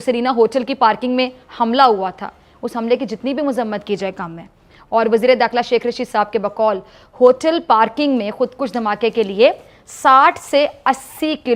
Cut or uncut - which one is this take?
uncut